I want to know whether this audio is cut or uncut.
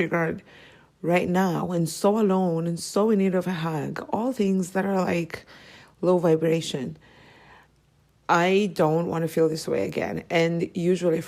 uncut